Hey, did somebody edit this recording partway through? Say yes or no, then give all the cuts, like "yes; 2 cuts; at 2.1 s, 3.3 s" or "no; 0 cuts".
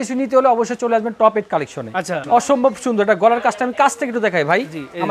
yes; 1 cut; at 2.2 s